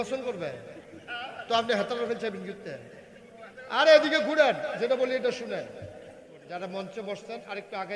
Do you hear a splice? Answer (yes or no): yes